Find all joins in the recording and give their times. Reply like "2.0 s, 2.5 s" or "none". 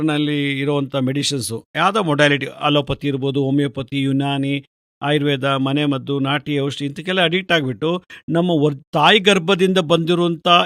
none